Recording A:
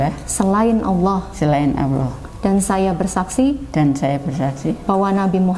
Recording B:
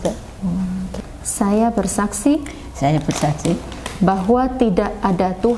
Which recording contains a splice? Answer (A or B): B